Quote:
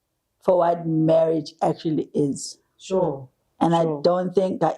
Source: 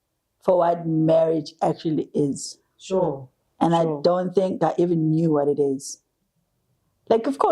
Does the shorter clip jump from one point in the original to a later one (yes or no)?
no